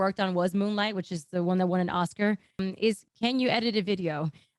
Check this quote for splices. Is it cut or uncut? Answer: cut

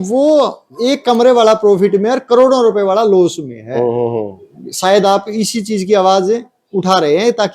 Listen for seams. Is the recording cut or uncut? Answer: uncut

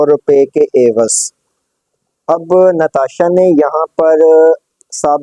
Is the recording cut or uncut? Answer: uncut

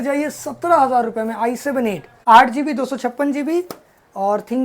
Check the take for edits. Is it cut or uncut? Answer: cut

